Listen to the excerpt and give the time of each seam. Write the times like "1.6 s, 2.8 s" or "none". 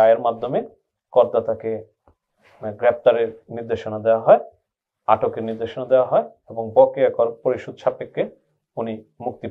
none